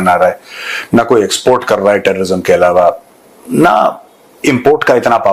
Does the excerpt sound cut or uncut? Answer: uncut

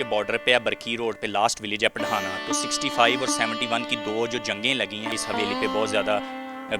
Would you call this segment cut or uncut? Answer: cut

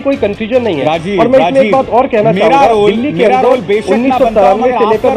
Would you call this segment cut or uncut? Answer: uncut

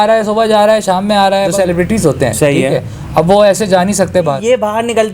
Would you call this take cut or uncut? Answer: cut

